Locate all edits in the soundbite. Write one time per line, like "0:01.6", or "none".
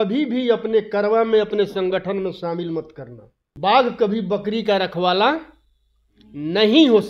0:03.5